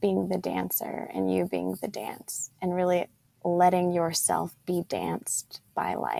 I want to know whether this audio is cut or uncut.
uncut